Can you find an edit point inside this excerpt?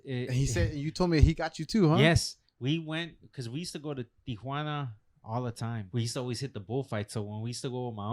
yes; 1 cut; at 5.8 s

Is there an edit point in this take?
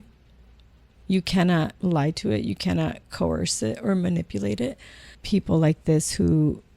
yes; 2 cuts; at 1.7 s, 5.2 s

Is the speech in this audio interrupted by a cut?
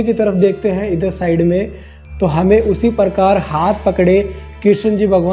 no; 0 cuts

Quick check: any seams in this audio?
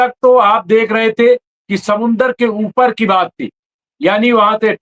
no; 0 cuts

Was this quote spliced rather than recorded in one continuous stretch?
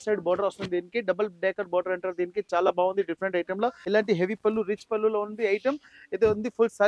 yes; 1 cut; at 3.8 s

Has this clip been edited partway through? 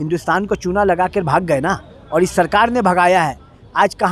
no; 0 cuts

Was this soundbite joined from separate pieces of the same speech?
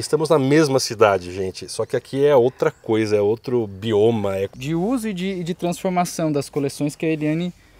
yes; 1 cut; at 4.6 s

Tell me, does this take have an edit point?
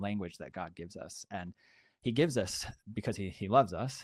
no; 0 cuts

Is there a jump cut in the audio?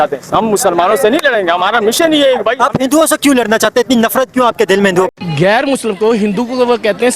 yes; 1 cut; at 5.1 s

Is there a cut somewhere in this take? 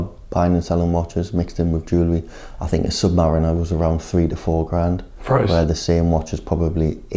no; 0 cuts

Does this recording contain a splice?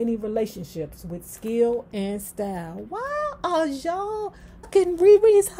yes; 1 cut; at 4.7 s

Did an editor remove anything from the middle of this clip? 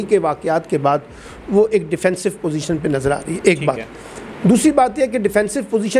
no; 0 cuts

